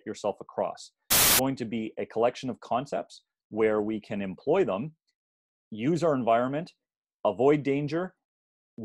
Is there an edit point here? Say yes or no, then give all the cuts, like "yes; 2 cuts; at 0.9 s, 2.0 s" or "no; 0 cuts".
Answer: yes; 1 cut; at 1.2 s